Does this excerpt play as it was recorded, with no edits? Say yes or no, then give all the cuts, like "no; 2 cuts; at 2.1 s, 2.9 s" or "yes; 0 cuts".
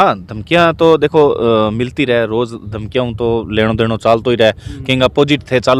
yes; 0 cuts